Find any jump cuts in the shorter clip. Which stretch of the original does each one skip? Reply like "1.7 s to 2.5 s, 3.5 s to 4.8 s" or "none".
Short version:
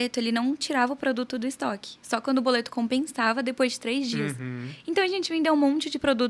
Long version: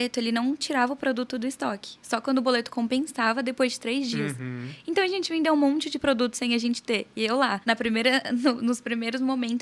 none